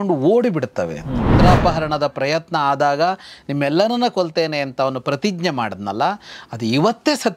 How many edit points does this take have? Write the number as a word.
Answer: one